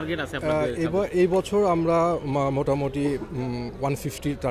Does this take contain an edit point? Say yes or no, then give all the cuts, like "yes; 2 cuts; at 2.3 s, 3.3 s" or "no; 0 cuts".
no; 0 cuts